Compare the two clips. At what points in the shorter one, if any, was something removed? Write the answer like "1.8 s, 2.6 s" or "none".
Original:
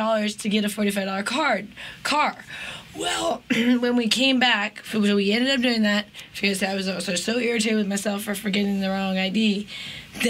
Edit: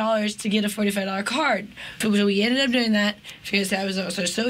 1.8 s